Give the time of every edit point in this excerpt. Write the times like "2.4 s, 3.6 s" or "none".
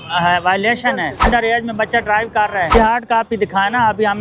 1.3 s, 2.7 s